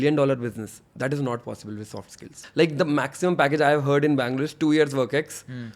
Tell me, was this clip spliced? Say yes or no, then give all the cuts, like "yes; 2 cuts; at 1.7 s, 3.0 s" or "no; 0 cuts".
yes; 1 cut; at 2.3 s